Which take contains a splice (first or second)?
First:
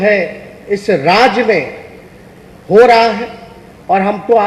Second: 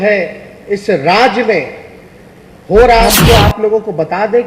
second